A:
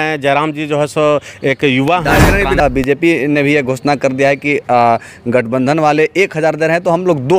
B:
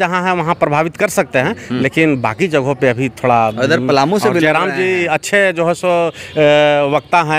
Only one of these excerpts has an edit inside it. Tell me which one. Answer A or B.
A